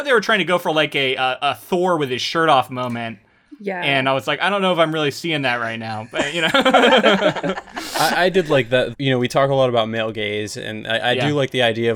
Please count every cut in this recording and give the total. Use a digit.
1